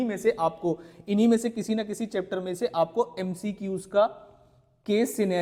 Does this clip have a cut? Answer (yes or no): no